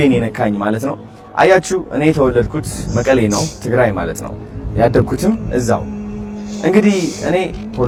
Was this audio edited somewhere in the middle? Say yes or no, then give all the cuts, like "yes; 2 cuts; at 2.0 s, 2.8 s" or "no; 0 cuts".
no; 0 cuts